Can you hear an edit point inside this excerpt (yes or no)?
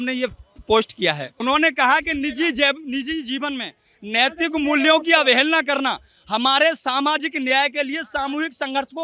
yes